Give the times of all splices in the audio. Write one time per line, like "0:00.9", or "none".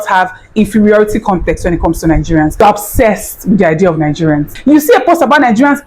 0:02.6
0:04.5